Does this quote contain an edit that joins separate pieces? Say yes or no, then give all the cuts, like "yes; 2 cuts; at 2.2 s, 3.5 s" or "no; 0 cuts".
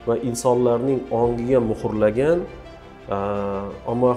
no; 0 cuts